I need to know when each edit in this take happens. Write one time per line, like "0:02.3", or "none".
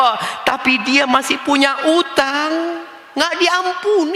none

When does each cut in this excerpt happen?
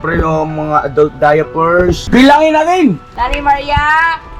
0:02.0
0:03.1

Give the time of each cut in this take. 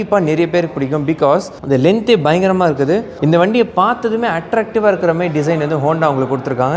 none

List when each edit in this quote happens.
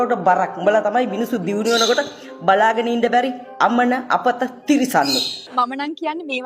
0:05.3

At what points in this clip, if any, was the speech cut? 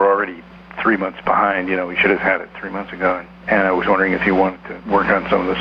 0:03.3
0:04.7

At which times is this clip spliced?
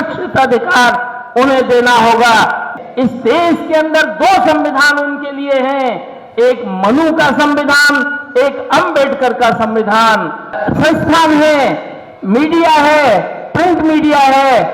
0:02.7
0:10.6

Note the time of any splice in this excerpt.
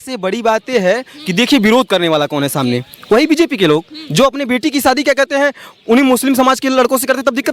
none

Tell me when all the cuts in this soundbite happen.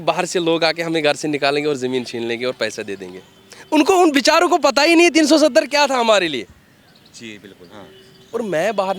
none

